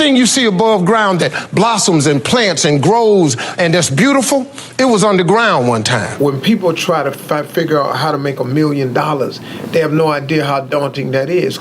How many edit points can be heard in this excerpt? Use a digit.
1